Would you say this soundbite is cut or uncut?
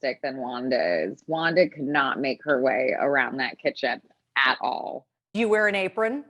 cut